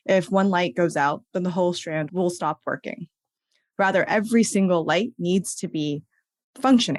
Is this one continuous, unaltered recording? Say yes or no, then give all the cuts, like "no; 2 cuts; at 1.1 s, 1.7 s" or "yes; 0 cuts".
yes; 0 cuts